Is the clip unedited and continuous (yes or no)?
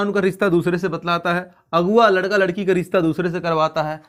yes